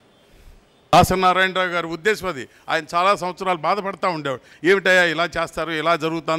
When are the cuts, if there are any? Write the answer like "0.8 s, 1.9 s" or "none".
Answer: 0.9 s